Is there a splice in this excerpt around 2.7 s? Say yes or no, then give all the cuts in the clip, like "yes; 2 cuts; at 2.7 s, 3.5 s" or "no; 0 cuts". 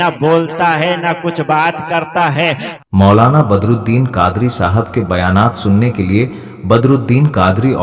yes; 1 cut; at 2.7 s